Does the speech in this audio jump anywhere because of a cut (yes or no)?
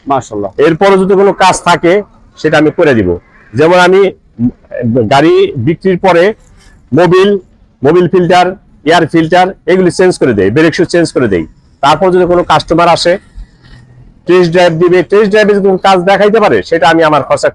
no